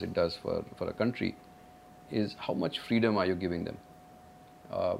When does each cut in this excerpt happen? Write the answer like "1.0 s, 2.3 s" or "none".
none